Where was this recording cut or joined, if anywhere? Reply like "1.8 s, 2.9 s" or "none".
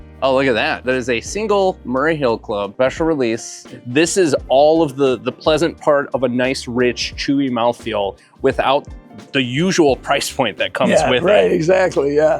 3.7 s